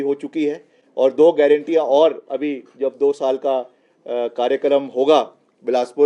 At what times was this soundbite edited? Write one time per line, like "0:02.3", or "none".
none

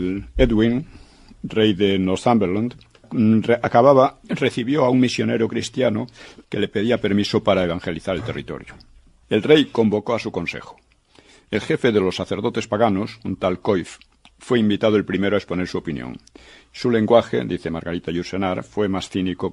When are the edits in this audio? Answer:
0:15.4

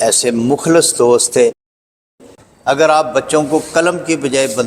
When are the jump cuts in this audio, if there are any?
0:01.9

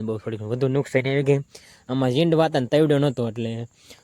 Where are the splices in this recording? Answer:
none

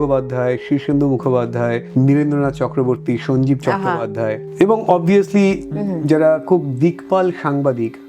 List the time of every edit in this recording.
0:01.8
0:04.4

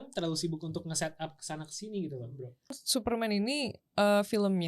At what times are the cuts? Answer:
0:02.8

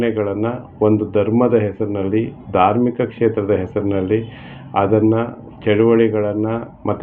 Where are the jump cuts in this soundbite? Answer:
none

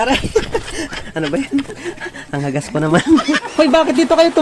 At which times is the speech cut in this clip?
0:03.4

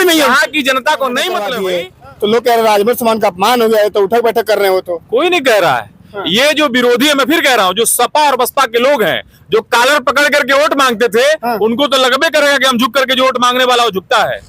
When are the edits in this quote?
0:01.5

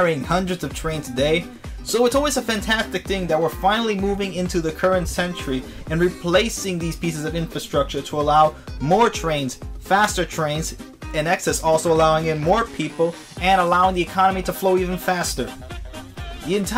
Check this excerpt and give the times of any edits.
none

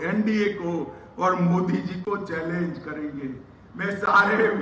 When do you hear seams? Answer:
none

